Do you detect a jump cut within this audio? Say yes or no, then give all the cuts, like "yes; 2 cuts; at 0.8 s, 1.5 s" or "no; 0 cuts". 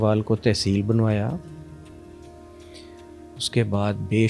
no; 0 cuts